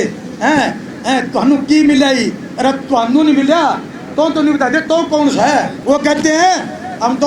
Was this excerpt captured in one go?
no; 1 cut; at 5.7 s

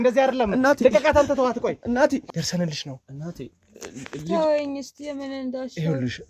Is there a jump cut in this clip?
yes; 1 cut; at 2.2 s

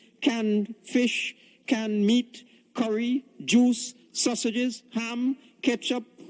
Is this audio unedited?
yes; 0 cuts

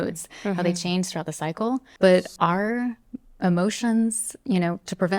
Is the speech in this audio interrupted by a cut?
yes; 1 cut; at 1.9 s

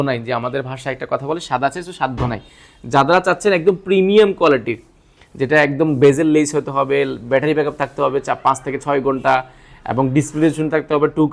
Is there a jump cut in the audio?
no; 0 cuts

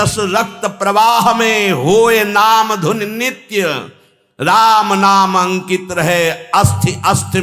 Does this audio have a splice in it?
no; 0 cuts

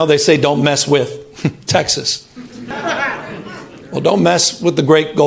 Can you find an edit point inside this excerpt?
yes; 1 cut; at 2.7 s

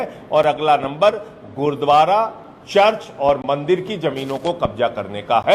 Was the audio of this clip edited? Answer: no; 0 cuts

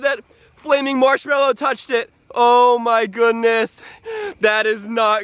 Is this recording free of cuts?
yes; 0 cuts

